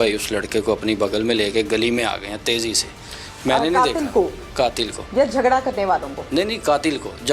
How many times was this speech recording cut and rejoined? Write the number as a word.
zero